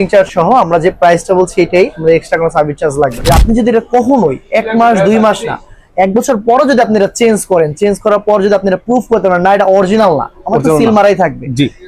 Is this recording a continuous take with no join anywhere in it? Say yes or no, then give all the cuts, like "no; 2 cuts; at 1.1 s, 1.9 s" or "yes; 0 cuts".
no; 1 cut; at 3.2 s